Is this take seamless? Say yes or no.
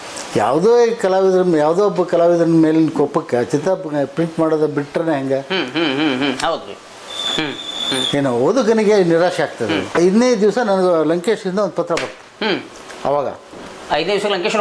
no